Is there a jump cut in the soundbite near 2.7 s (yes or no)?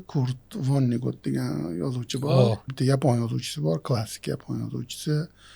yes